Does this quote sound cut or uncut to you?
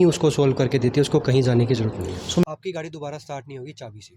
cut